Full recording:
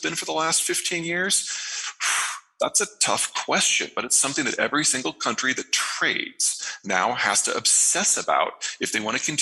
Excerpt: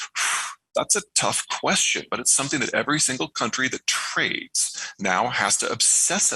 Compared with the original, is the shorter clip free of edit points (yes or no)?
yes